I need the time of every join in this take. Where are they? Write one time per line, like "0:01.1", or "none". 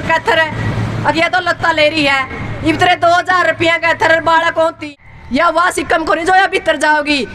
0:04.8